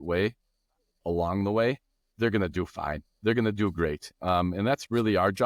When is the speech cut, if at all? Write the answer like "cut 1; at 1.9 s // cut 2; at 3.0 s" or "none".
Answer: none